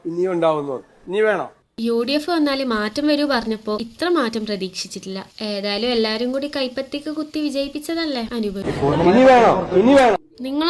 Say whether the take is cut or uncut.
cut